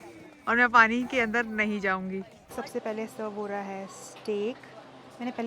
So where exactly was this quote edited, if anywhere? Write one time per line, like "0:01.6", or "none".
0:02.3